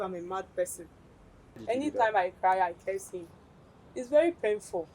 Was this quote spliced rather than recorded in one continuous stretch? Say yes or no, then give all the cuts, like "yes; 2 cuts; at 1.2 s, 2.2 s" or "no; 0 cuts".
yes; 1 cut; at 1.6 s